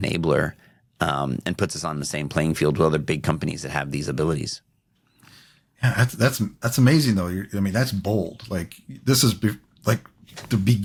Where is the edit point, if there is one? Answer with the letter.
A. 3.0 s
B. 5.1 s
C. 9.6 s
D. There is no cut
D